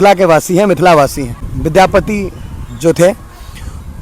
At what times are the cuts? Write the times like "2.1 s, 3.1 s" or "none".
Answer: 1.3 s